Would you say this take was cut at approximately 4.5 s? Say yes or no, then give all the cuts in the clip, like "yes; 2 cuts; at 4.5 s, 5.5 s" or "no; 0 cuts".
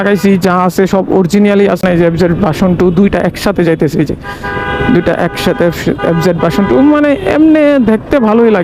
no; 1 cut; at 1.8 s